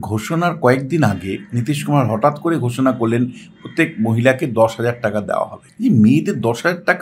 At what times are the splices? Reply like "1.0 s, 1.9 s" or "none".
5.6 s